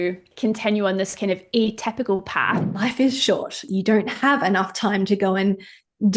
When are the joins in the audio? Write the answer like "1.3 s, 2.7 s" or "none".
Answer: 2.6 s, 3.6 s